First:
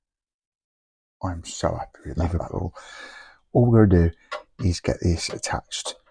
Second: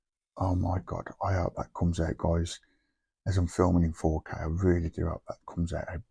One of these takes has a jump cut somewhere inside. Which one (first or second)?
first